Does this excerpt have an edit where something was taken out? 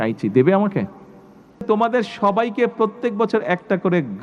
yes; 1 cut; at 1.6 s

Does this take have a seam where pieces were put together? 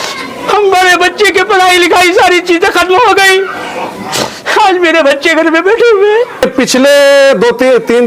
yes; 1 cut; at 6.5 s

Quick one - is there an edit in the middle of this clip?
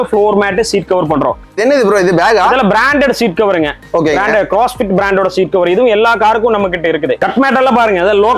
yes; 2 cuts; at 1.5 s, 7.2 s

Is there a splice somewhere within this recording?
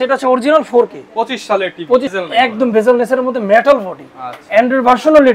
yes; 1 cut; at 2.1 s

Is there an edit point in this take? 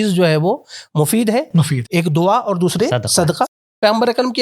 no; 0 cuts

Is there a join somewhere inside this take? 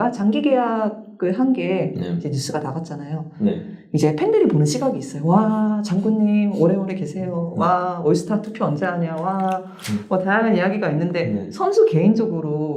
no; 0 cuts

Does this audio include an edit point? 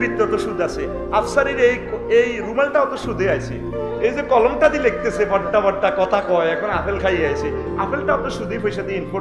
no; 0 cuts

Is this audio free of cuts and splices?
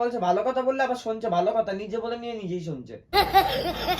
no; 1 cut; at 3.1 s

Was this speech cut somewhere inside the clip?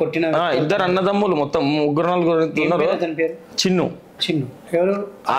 yes; 1 cut; at 3.5 s

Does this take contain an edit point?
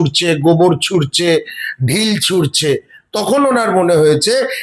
no; 0 cuts

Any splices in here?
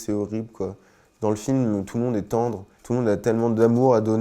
yes; 1 cut; at 2.7 s

